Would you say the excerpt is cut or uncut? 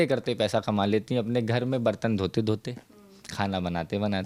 uncut